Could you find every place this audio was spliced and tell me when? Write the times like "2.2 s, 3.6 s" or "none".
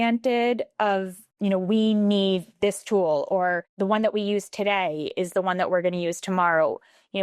1.2 s, 3.7 s